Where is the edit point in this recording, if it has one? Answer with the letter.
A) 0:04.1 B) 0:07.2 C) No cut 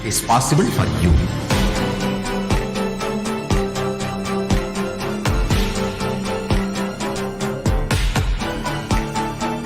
B